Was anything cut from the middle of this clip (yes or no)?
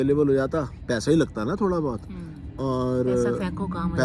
no